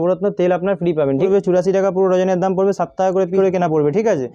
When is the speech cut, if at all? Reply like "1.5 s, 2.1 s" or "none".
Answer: 1.3 s, 3.4 s